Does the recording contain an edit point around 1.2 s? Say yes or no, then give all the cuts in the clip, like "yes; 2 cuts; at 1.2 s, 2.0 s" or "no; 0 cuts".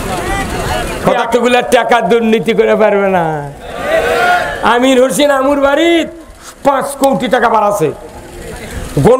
yes; 1 cut; at 1.2 s